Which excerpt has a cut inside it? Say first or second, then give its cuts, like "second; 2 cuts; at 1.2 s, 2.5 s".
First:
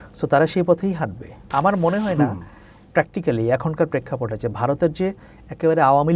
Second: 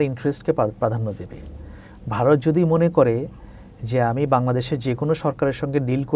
first; 1 cut; at 1.5 s